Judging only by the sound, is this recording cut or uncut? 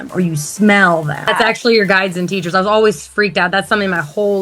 cut